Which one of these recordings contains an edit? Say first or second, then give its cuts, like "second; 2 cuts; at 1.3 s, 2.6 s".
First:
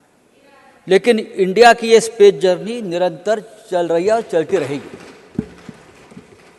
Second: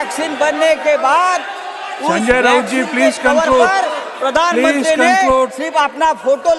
first; 1 cut; at 5.5 s